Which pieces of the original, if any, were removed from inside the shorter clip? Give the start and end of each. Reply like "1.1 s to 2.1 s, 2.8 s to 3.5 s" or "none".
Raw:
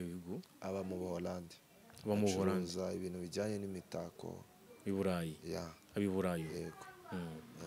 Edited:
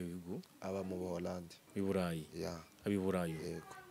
1.6 s to 4.7 s